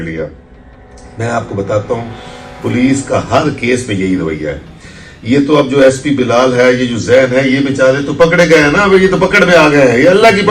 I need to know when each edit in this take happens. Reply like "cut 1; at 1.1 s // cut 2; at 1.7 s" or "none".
none